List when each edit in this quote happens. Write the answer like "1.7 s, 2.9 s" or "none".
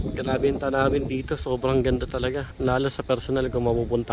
2.5 s